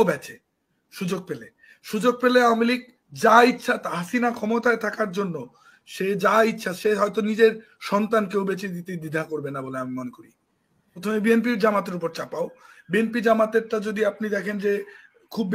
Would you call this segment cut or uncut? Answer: cut